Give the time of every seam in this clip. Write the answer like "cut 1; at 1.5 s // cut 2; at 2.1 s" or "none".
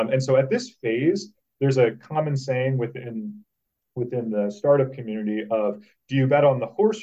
none